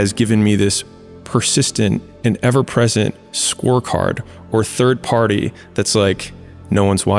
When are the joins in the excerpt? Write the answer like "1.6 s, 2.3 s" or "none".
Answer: none